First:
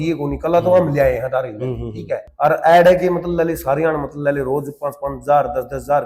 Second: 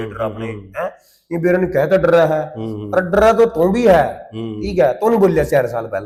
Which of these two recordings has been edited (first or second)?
first